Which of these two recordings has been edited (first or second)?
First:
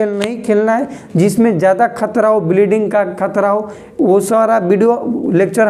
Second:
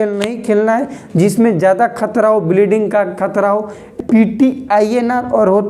second